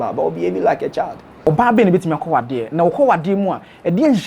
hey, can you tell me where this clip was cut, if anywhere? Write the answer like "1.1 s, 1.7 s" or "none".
1.5 s